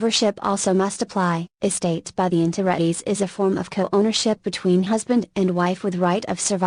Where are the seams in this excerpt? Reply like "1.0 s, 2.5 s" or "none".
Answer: none